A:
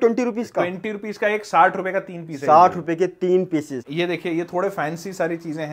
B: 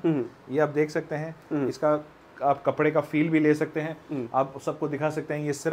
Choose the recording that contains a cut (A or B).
A